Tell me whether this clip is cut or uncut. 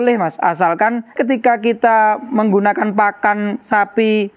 cut